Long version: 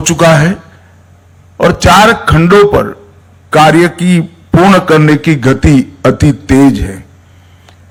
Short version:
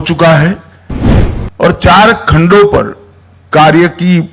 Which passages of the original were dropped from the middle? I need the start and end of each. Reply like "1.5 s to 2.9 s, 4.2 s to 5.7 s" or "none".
none

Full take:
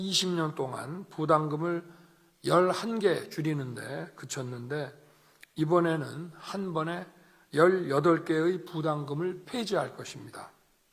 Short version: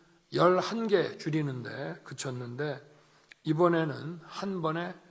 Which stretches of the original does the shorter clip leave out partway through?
none

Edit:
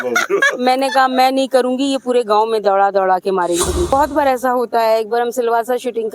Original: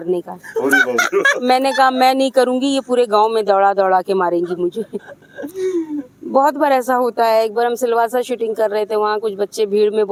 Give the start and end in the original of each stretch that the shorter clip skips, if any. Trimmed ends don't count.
4.8 s to 6.4 s

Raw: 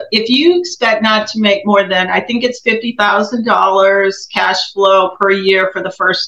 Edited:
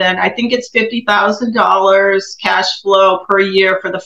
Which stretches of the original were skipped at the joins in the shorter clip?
none

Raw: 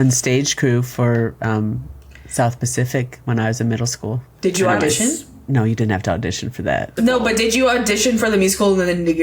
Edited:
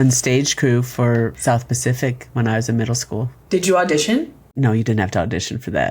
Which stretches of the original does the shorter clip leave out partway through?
1.4 s to 2.3 s

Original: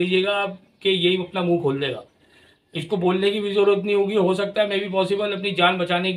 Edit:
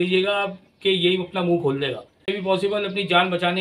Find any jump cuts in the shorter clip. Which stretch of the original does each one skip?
2.3 s to 4.8 s

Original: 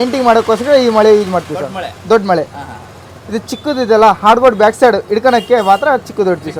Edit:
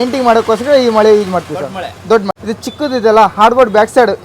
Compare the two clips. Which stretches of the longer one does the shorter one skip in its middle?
2.3 s to 3.1 s

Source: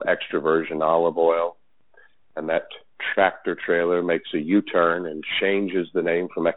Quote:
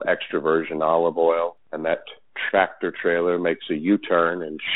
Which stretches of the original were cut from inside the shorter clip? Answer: 1.7 s to 2.3 s

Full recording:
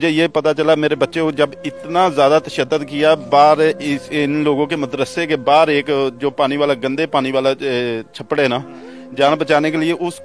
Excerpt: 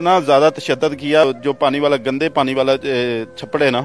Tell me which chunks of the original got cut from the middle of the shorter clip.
3.1 s to 6.0 s

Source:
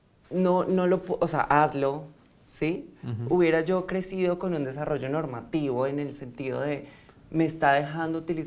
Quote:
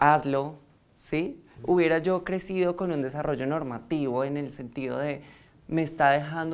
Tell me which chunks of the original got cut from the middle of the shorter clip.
3.0 s to 3.1 s

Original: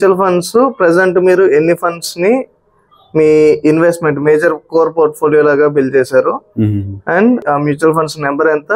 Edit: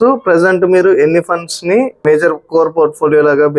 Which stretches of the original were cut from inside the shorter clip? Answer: 2.5 s to 4.2 s

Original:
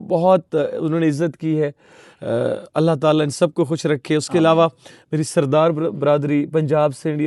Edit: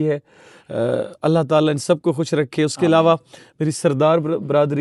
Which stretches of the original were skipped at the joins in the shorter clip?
none

